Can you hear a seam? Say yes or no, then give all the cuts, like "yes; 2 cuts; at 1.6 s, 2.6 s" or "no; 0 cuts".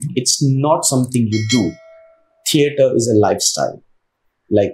no; 0 cuts